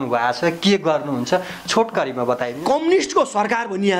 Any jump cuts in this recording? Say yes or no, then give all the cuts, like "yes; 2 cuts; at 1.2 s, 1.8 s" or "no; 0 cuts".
yes; 1 cut; at 2.5 s